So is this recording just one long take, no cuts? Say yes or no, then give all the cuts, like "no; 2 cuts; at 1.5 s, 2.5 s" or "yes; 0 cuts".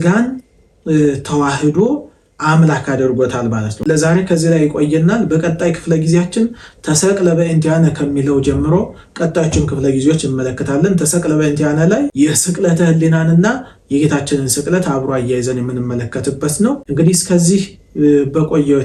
yes; 0 cuts